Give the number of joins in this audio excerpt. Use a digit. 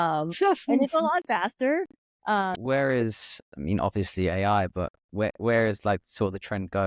1